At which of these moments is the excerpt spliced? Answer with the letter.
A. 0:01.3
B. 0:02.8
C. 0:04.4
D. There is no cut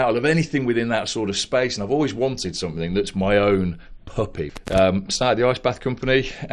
C